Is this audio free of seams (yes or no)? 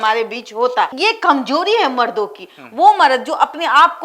yes